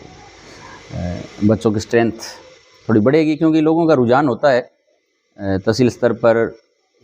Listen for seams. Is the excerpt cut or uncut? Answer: uncut